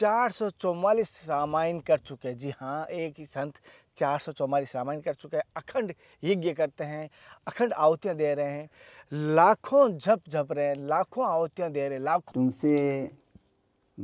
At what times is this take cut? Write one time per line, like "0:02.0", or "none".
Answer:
0:12.3